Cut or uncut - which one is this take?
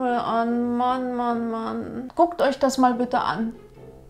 cut